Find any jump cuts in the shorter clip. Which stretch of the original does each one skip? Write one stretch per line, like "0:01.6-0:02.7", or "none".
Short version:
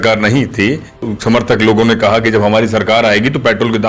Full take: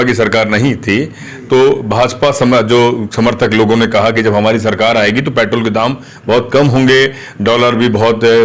0:01.4-0:03.0